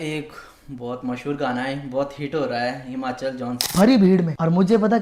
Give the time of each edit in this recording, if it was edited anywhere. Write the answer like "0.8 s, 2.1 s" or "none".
3.5 s